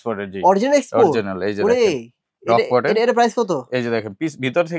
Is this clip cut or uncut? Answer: uncut